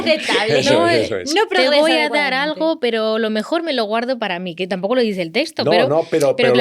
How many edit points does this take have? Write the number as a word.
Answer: zero